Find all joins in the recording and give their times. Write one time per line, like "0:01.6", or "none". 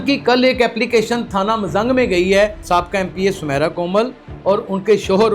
0:02.6